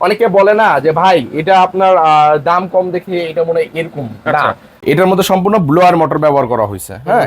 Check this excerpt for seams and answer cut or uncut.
cut